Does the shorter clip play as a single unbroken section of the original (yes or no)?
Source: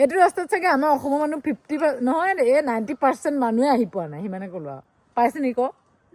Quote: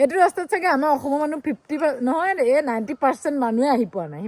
yes